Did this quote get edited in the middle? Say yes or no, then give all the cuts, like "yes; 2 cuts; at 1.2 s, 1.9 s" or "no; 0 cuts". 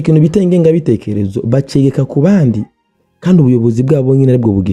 no; 0 cuts